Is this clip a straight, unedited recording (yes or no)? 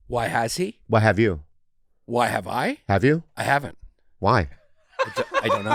yes